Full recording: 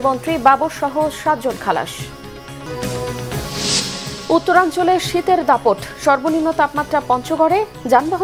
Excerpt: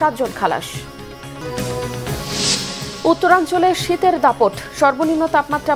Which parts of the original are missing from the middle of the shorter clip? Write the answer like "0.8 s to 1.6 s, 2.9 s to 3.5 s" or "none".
none